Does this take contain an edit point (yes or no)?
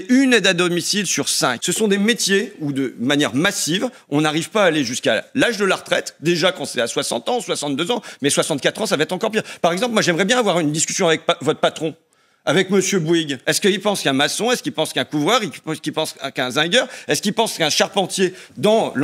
yes